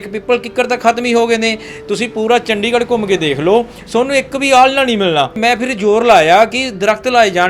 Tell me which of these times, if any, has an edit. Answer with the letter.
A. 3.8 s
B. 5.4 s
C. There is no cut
B